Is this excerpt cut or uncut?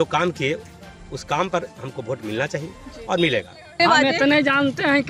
cut